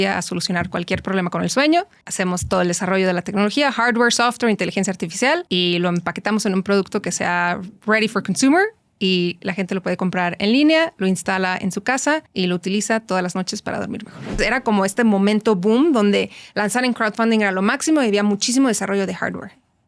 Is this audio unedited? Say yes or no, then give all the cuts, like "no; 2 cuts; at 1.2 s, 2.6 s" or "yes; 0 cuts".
no; 4 cuts; at 2.0 s, 5.5 s, 12.3 s, 14.4 s